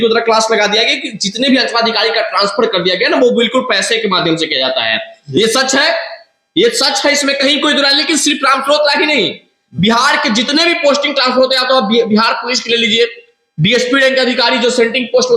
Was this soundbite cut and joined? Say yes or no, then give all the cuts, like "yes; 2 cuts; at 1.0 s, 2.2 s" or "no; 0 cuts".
no; 0 cuts